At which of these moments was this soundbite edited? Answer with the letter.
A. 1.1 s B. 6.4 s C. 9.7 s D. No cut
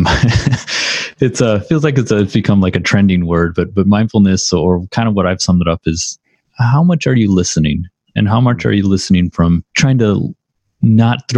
C